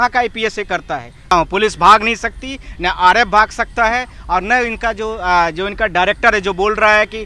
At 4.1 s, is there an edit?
no; 1 cut; at 1.3 s

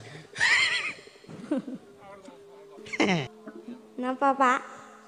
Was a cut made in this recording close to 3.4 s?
yes; 1 cut; at 3.4 s

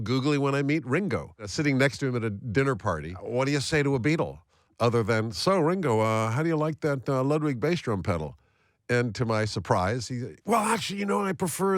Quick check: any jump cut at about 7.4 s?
no; 2 cuts; at 1.5 s, 3.1 s

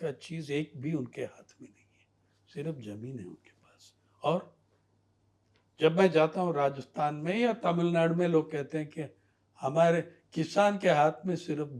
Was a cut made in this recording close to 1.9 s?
no; 0 cuts

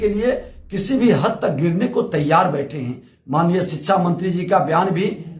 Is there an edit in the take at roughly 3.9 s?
no; 0 cuts

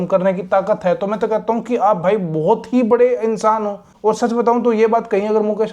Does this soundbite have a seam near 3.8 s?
yes; 1 cut; at 3.8 s

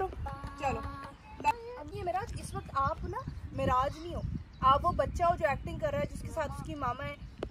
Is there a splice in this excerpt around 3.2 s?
no; 1 cut; at 1.9 s

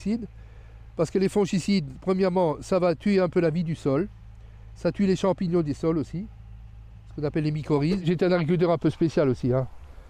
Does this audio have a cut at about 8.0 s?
yes; 1 cut; at 8.0 s

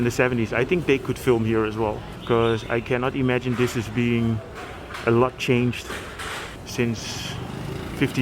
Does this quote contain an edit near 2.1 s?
yes; 2 cuts; at 2.1 s, 6.6 s

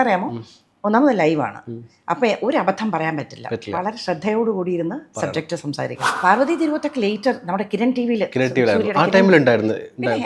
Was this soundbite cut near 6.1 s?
yes; 1 cut; at 6.1 s

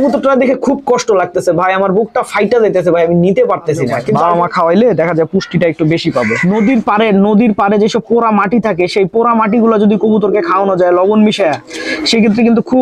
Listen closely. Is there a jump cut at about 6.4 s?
yes; 2 cuts; at 4.0 s, 6.4 s

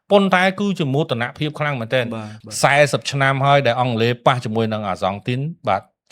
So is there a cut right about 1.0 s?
no; 1 cut; at 2.3 s

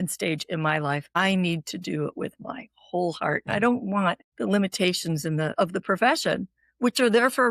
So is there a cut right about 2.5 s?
no; 3 cuts; at 1.2 s, 4.3 s, 5.5 s

